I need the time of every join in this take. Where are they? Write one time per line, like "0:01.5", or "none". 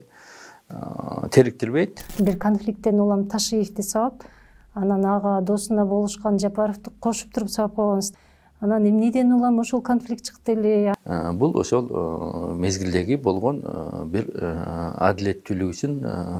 0:02.0
0:08.1
0:10.9